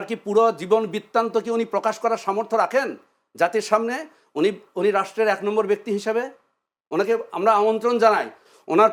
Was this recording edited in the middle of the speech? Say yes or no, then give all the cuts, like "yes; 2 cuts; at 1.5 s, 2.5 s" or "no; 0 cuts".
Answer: no; 0 cuts